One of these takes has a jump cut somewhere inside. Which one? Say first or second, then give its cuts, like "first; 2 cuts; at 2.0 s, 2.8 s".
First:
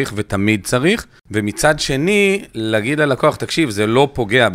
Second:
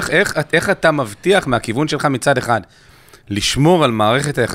first; 1 cut; at 1.2 s